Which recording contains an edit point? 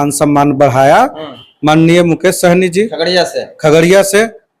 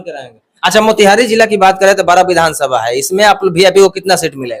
first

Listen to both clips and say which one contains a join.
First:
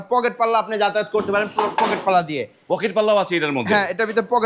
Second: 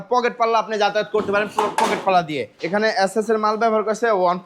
second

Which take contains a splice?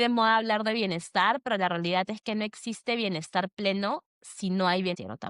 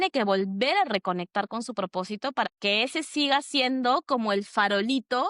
second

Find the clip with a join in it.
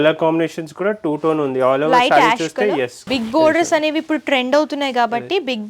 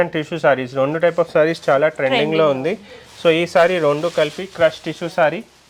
first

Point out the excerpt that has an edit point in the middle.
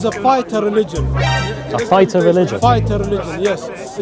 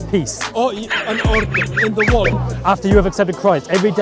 second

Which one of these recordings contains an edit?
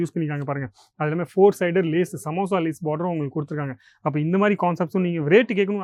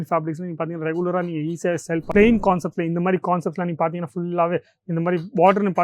second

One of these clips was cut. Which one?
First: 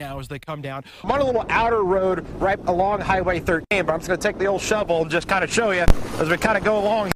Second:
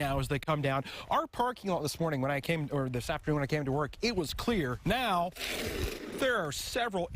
first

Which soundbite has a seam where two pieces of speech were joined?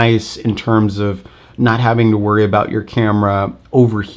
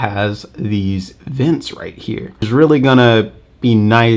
second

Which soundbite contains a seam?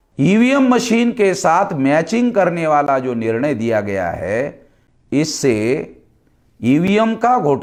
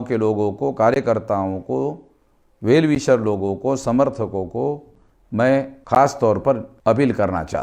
second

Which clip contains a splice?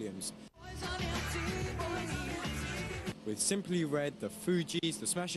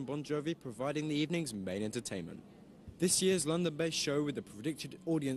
second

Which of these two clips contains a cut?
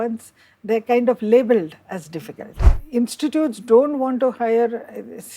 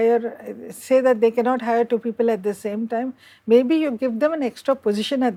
first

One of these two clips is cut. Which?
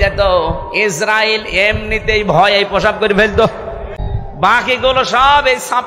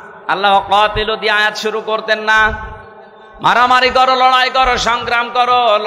first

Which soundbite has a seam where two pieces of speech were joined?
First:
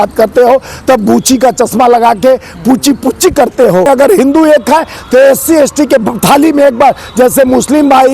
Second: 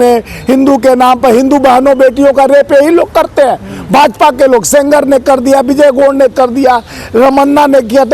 first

